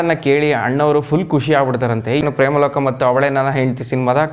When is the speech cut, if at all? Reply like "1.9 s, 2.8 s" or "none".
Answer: 2.2 s